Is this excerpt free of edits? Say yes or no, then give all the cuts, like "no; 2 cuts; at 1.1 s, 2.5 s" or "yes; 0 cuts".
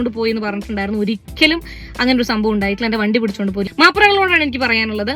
no; 1 cut; at 3.6 s